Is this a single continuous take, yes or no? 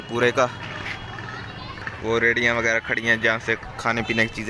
no